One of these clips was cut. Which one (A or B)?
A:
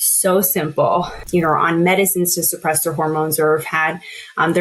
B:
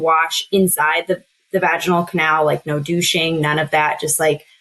A